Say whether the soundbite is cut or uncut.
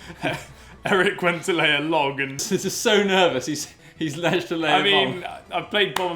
cut